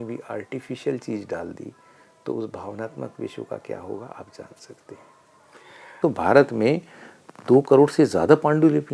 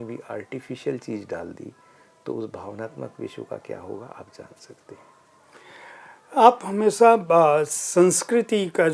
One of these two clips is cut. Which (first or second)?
first